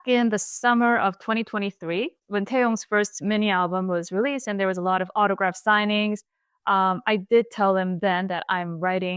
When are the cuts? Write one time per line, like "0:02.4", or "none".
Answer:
0:02.2